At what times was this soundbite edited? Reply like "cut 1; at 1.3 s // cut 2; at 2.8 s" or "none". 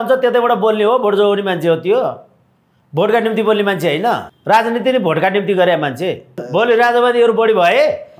cut 1; at 4.3 s // cut 2; at 6.4 s